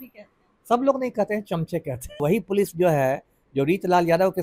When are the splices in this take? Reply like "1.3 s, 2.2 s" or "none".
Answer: 2.2 s

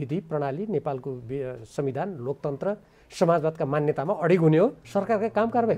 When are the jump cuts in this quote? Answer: 4.8 s

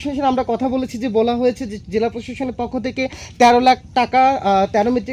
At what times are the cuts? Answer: none

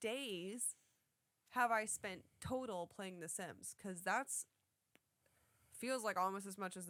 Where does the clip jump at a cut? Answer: none

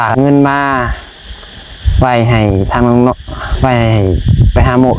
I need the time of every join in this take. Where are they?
none

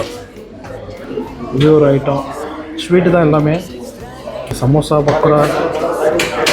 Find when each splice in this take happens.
1.0 s, 4.6 s

